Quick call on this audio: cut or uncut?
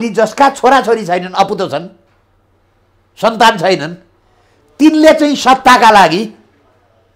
uncut